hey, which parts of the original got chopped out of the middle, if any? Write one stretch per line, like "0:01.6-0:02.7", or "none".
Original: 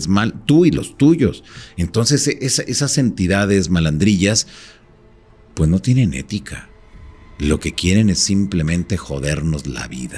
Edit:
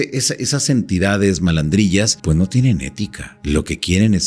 0:04.4-0:05.5
0:06.6-0:07.2